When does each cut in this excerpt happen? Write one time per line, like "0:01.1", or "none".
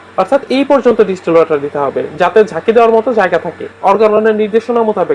0:03.7